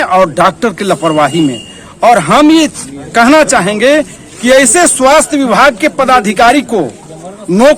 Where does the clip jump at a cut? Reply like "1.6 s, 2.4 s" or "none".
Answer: none